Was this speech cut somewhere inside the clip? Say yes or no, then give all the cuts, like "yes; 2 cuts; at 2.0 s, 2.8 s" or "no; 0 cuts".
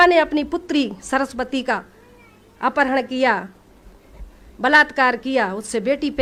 no; 0 cuts